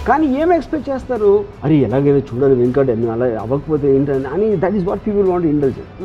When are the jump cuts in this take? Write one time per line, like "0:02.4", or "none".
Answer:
none